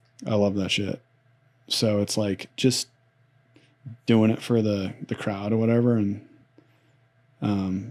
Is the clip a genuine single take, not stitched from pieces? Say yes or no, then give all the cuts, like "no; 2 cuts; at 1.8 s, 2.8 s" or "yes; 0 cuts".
yes; 0 cuts